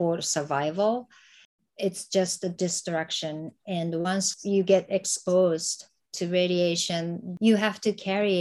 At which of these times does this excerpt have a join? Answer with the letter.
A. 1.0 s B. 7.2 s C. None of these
B